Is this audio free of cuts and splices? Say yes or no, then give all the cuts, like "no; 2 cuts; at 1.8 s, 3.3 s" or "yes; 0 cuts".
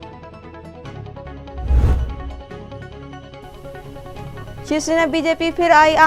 no; 1 cut; at 2.5 s